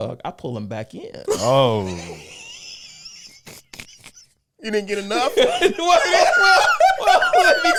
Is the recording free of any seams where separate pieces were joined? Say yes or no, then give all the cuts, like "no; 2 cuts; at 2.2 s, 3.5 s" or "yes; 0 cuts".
yes; 0 cuts